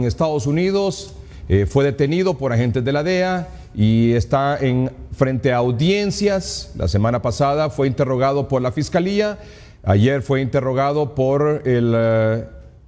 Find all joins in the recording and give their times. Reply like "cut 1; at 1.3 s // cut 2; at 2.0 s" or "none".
cut 1; at 3.1 s

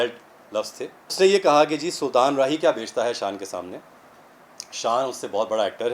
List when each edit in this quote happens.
cut 1; at 1.0 s

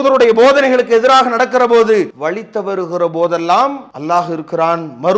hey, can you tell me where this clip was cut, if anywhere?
cut 1; at 2.1 s // cut 2; at 3.9 s

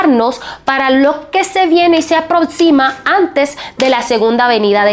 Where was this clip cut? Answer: none

